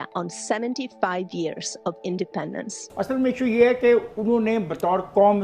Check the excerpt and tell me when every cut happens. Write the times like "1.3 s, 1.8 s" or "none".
2.8 s

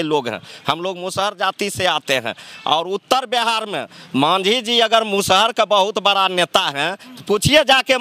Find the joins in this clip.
none

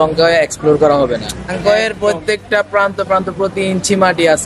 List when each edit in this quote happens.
1.5 s

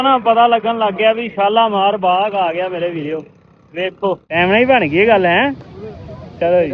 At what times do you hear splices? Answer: 4.3 s

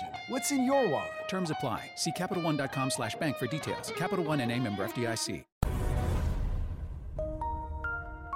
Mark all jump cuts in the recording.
5.5 s

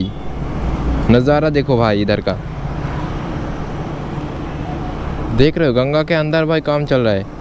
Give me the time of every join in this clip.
none

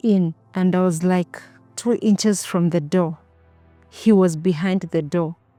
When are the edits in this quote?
none

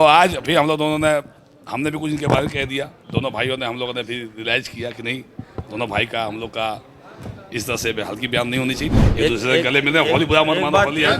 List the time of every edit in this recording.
8.9 s

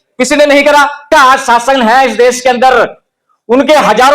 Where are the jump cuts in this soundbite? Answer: 1.1 s

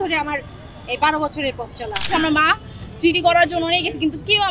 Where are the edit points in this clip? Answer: 2.0 s

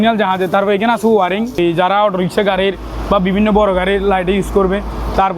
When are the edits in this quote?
1.6 s

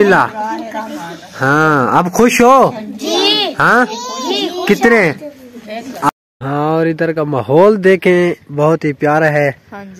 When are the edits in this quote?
6.1 s

